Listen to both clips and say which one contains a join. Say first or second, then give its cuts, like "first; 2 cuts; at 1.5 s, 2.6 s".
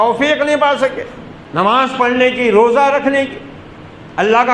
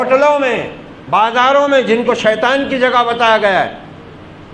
first; 1 cut; at 1.0 s